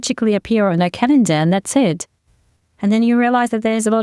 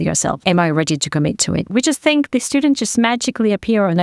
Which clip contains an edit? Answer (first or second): second